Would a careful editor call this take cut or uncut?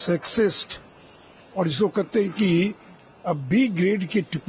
uncut